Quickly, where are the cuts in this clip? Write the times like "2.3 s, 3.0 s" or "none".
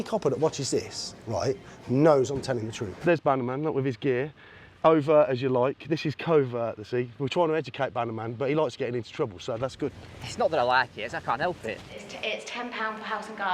3.0 s, 12.0 s